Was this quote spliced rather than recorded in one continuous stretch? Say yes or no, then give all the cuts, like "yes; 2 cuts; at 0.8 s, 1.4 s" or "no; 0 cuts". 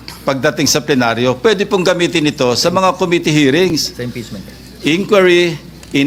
no; 0 cuts